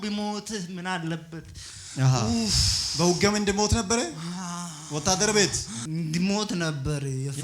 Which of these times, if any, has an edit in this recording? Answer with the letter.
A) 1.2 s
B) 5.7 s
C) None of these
B